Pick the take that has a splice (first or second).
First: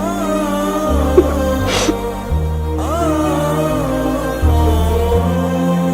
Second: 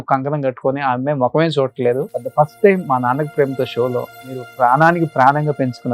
second